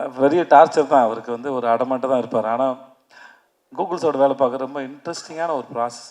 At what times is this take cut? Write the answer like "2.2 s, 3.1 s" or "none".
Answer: none